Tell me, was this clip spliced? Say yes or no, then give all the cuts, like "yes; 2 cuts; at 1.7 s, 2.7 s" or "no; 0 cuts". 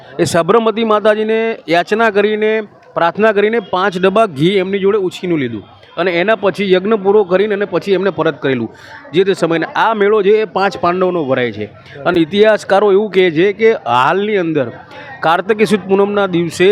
no; 0 cuts